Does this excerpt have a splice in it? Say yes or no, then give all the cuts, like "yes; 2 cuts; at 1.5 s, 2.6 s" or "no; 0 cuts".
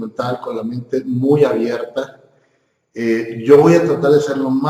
no; 0 cuts